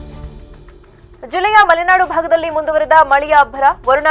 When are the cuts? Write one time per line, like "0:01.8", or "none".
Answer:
0:01.0